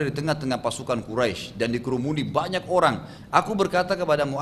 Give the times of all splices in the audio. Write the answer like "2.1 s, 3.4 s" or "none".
3.1 s